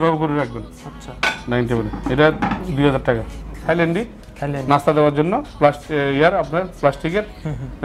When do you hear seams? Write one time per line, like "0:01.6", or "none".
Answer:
0:03.6

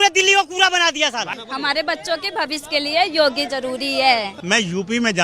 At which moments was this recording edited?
0:01.4
0:04.3

